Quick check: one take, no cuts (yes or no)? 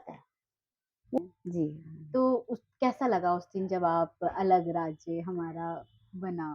no